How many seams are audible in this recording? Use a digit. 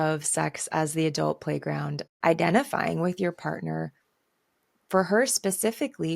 1